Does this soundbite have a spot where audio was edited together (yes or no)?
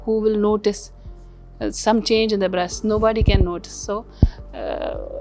no